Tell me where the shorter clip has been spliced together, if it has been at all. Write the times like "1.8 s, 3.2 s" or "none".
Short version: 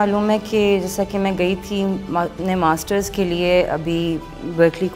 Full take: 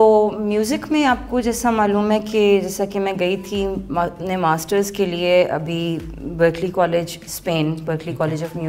none